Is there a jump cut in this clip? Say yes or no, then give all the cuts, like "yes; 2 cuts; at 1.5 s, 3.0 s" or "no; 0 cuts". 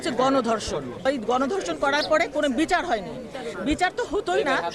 yes; 1 cut; at 1.1 s